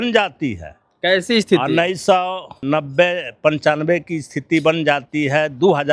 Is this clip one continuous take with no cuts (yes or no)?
no